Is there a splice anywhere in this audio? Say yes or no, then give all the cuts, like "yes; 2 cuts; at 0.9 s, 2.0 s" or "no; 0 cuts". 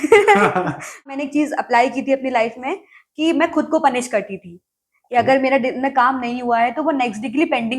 yes; 1 cut; at 1.2 s